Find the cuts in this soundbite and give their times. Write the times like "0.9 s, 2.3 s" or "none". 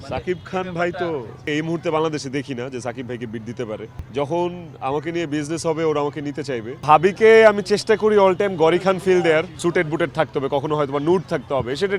1.4 s, 3.9 s, 6.8 s, 9.5 s